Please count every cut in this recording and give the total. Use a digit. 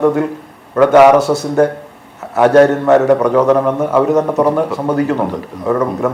0